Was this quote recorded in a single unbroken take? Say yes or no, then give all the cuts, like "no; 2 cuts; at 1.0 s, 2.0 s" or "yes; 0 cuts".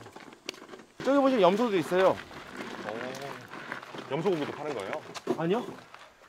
no; 1 cut; at 1.0 s